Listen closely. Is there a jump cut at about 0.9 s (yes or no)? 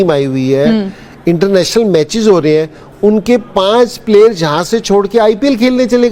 no